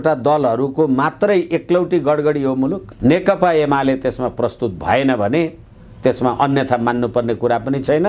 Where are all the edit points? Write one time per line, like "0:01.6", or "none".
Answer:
0:02.9